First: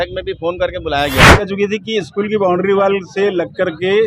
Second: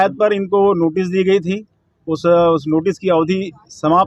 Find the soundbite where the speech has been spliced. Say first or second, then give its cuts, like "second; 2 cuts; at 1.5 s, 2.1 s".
first; 1 cut; at 1.4 s